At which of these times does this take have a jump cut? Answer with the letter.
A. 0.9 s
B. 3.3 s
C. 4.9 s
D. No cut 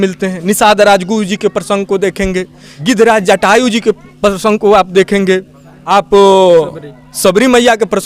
D